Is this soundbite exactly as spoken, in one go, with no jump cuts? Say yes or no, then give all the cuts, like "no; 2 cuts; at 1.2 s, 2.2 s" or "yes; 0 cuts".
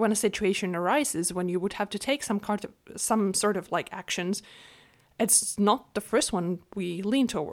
yes; 0 cuts